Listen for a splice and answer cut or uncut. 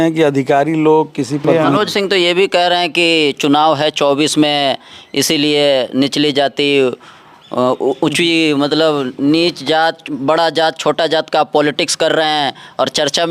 cut